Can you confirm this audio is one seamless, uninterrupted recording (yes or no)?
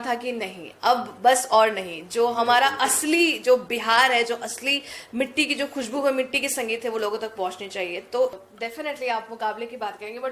no